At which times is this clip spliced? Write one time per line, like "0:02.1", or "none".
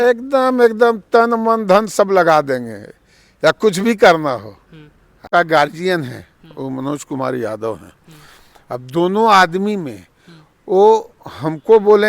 0:05.3